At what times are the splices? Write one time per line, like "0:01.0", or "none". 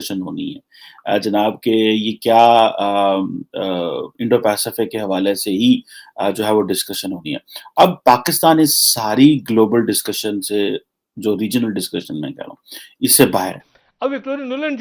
0:13.6